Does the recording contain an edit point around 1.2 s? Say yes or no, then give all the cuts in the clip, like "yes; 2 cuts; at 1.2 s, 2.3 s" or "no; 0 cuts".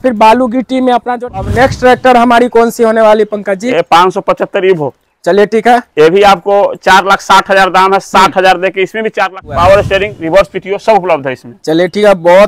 yes; 2 cuts; at 1.2 s, 9.5 s